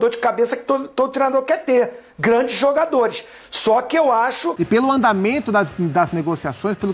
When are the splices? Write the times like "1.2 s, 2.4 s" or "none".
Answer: 4.5 s